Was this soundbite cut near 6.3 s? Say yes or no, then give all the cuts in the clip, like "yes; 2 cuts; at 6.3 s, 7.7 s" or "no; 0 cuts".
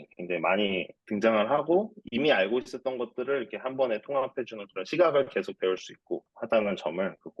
yes; 2 cuts; at 1.0 s, 6.3 s